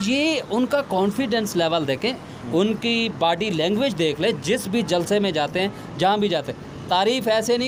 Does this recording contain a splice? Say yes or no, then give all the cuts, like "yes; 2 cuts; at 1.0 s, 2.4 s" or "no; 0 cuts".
no; 0 cuts